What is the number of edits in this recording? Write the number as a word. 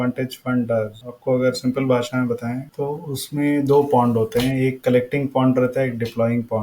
two